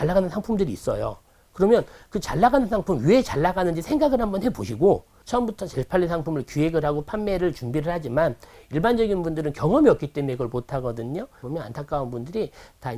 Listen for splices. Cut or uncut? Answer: cut